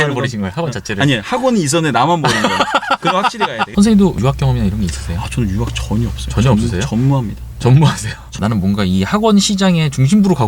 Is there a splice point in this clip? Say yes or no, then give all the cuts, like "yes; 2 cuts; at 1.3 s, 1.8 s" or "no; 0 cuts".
yes; 2 cuts; at 3.7 s, 8.4 s